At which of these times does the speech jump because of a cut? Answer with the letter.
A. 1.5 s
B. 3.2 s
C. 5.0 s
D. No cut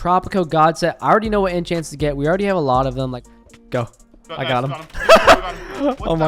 B